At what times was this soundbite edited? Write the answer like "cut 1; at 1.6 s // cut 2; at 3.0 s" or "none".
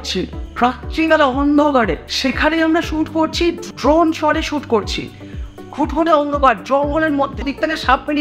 cut 1; at 2.0 s // cut 2; at 3.6 s // cut 3; at 7.4 s